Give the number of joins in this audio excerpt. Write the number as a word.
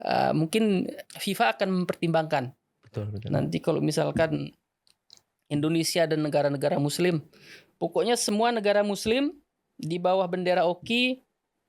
one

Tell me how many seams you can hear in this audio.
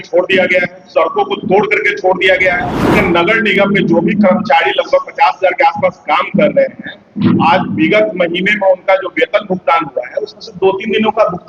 one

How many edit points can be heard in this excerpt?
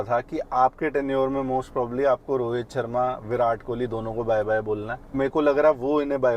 one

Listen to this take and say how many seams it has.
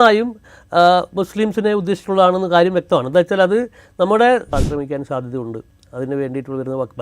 one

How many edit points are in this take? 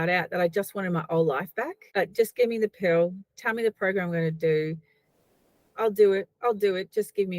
one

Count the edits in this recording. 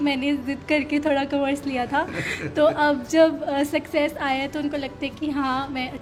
zero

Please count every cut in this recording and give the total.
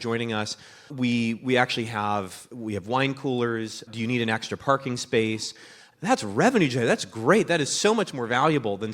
one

